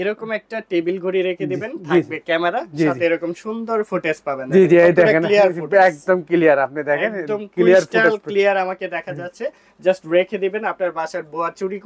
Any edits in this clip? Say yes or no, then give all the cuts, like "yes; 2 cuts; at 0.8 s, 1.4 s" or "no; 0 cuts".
no; 0 cuts